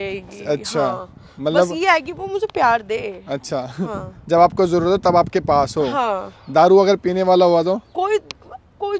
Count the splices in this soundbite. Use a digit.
0